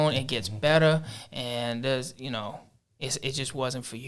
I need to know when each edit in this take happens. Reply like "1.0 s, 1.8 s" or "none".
none